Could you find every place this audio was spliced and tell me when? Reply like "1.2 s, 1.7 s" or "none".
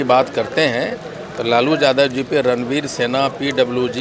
none